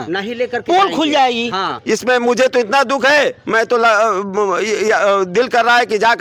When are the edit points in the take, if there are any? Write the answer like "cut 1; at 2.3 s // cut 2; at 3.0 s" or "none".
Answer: cut 1; at 1.7 s